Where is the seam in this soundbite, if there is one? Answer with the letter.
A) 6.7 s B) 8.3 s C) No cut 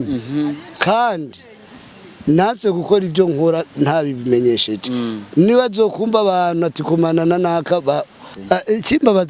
B